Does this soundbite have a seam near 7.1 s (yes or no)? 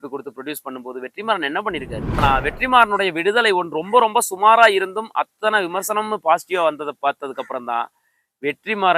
no